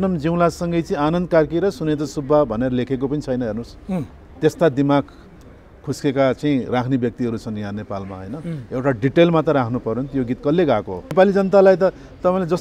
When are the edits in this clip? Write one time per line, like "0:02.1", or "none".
0:11.1